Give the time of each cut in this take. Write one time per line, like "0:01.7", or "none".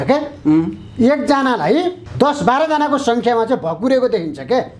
none